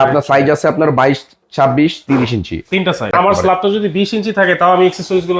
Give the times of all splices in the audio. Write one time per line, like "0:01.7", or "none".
0:03.1